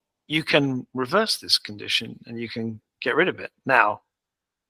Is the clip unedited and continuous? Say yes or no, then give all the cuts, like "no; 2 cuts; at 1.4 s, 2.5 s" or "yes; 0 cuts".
yes; 0 cuts